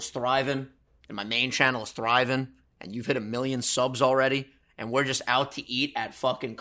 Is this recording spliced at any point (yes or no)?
no